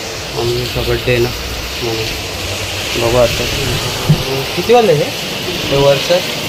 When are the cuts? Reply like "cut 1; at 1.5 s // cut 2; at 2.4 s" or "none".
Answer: none